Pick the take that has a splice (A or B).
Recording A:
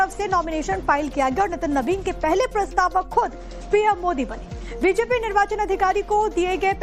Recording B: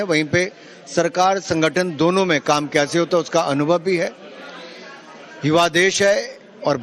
A